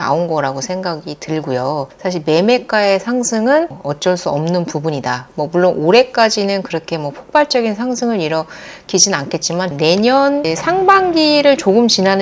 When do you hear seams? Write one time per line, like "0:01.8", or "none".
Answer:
0:09.7